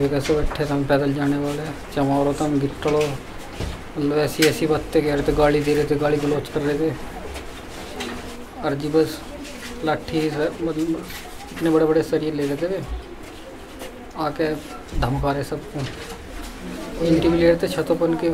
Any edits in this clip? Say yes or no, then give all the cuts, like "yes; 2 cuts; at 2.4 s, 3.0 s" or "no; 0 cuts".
no; 0 cuts